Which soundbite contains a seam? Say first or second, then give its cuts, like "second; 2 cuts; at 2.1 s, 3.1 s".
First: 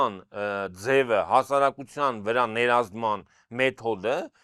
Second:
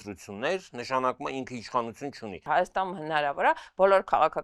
second; 1 cut; at 2.4 s